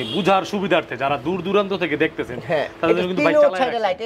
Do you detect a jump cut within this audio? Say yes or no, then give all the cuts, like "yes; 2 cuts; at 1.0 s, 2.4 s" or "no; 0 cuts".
no; 0 cuts